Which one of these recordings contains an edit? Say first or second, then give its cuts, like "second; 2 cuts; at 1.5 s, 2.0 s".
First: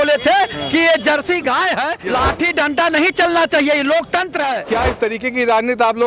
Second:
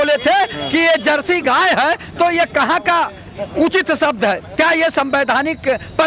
first; 2 cuts; at 2.1 s, 4.6 s